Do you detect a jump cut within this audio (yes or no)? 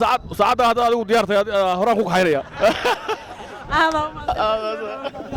no